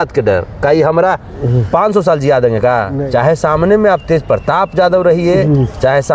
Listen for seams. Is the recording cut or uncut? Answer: cut